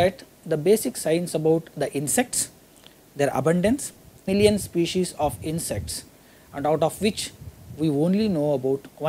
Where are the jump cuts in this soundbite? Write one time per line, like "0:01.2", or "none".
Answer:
none